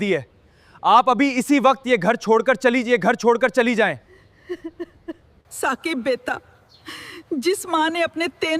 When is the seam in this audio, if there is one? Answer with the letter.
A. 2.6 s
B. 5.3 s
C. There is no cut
B